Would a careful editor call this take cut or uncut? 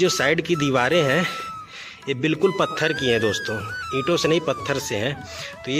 uncut